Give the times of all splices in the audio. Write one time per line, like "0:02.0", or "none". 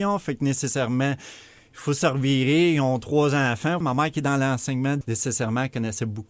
0:03.8
0:05.0